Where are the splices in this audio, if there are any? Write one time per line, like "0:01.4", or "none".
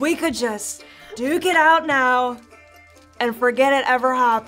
none